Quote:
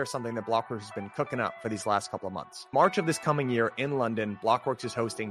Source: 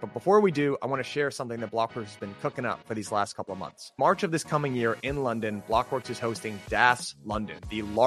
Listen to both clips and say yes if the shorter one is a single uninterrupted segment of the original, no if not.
yes